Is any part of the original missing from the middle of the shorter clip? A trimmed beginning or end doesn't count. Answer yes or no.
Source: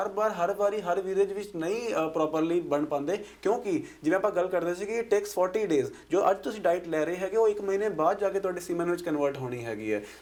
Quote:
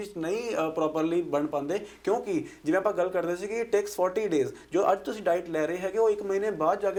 no